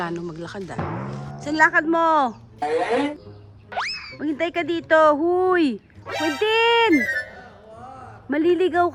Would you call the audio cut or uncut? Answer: uncut